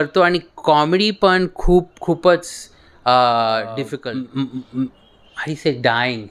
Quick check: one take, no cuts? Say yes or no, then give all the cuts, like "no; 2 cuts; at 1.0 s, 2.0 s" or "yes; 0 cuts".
no; 1 cut; at 3.9 s